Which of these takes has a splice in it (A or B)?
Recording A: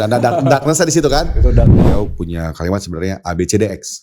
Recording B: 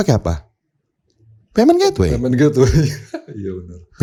A